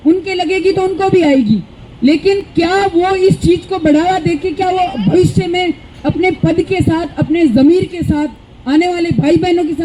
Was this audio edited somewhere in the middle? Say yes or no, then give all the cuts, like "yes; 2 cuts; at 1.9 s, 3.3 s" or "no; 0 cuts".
no; 0 cuts